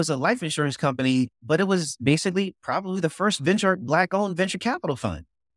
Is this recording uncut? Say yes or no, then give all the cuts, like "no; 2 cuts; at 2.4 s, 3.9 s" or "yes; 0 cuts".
yes; 0 cuts